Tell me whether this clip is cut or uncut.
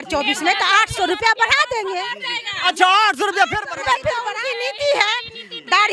cut